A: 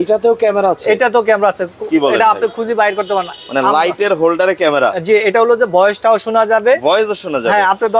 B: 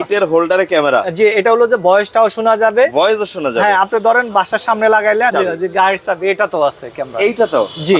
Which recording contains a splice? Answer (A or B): B